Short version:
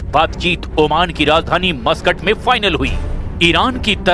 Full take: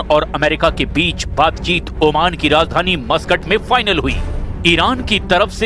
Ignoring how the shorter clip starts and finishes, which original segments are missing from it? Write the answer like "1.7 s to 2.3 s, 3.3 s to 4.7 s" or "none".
none